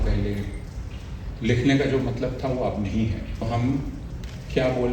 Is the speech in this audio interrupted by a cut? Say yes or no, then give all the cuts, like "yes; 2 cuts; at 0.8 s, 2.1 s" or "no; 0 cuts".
yes; 1 cut; at 3.4 s